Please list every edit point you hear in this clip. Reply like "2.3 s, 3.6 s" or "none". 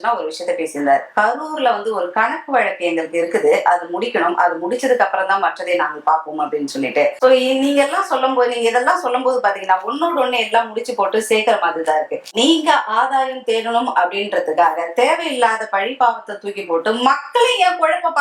none